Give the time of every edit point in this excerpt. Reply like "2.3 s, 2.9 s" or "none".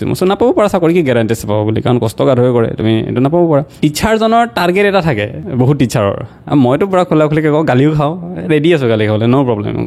3.7 s, 5.4 s